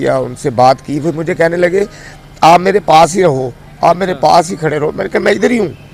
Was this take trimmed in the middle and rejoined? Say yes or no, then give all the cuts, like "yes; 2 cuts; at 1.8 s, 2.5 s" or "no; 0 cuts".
no; 0 cuts